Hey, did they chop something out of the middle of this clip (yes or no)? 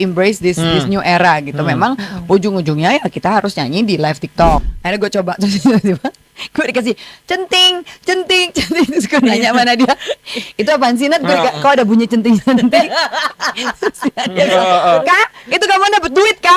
yes